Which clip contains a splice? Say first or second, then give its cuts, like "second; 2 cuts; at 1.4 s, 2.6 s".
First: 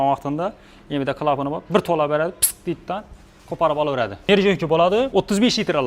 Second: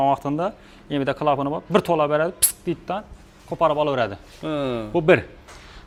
first; 2 cuts; at 4.2 s, 5.1 s